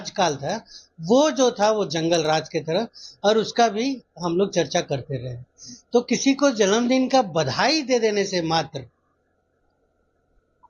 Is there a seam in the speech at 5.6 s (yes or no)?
no